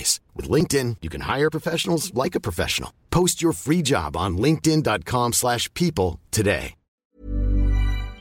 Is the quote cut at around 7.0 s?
yes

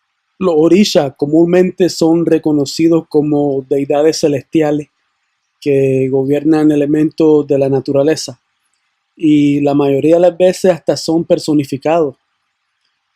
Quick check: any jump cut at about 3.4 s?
no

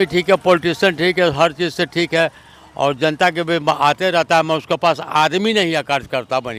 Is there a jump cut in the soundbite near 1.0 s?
no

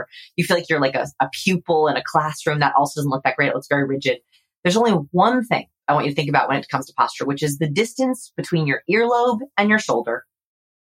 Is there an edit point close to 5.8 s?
yes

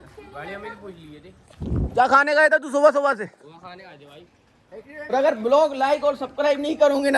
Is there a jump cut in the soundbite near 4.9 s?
yes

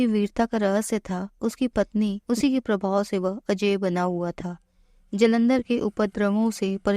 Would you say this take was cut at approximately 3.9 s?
no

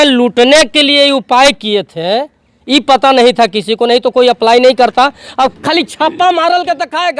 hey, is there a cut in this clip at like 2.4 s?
no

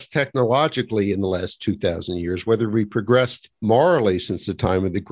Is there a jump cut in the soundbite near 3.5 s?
yes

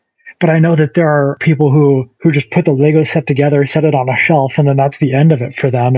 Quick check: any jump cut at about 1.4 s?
yes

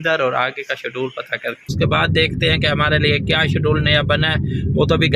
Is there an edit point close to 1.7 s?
yes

